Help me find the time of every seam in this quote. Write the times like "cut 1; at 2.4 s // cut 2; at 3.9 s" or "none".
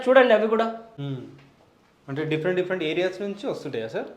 none